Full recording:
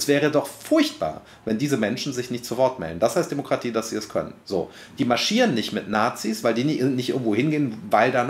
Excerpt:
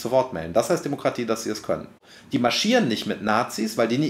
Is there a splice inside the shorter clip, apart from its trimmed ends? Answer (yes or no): yes